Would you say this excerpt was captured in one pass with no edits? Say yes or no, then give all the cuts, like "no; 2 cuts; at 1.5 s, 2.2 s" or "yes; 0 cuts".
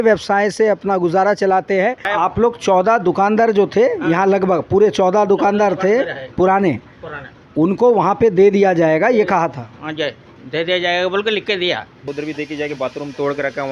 no; 2 cuts; at 2.1 s, 12.1 s